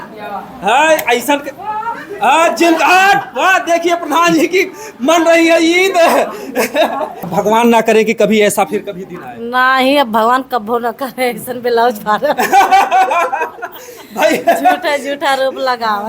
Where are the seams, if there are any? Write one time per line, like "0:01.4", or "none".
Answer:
0:07.3